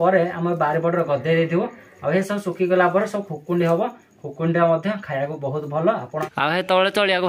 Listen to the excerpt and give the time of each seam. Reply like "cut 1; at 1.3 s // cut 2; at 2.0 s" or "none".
cut 1; at 6.1 s